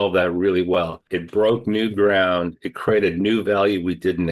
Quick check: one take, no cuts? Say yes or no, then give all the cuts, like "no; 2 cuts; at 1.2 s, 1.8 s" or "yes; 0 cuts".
no; 1 cut; at 1.1 s